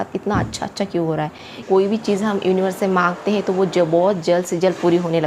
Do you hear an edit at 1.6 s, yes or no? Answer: yes